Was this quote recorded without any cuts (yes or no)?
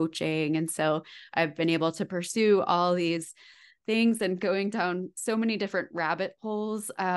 yes